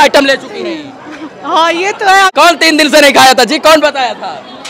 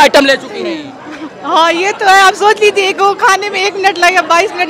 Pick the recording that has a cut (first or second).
first